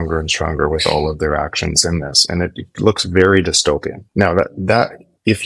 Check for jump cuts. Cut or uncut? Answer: cut